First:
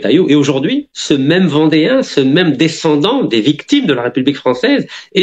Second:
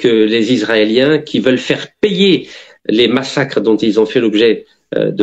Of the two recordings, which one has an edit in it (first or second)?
first